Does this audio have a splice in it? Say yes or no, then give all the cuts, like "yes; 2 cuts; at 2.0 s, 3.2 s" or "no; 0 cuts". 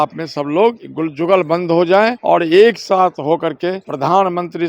yes; 3 cuts; at 0.9 s, 2.2 s, 3.9 s